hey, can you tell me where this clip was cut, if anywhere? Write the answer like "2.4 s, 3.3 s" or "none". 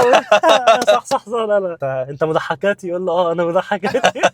1.8 s